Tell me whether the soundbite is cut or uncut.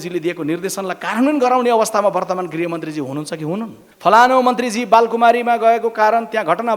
cut